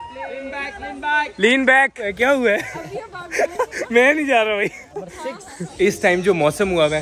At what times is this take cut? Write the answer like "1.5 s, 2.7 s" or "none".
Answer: 2.0 s, 5.6 s